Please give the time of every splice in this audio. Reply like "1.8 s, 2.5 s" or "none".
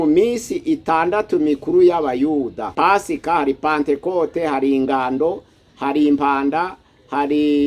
2.7 s